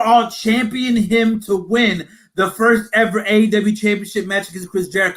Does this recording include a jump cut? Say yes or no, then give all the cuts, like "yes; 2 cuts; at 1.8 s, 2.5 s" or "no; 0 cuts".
no; 0 cuts